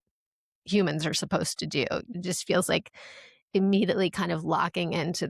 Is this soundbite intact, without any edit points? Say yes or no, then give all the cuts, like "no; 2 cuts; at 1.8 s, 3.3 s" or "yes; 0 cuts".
no; 1 cut; at 2.1 s